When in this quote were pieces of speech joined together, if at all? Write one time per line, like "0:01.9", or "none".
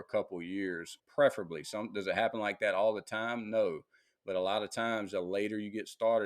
0:00.9